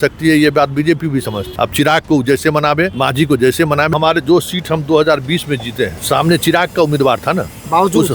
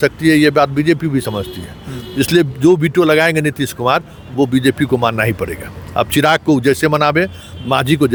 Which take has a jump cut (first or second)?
first